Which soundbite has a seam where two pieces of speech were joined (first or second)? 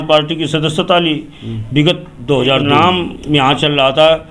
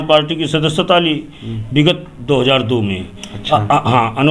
first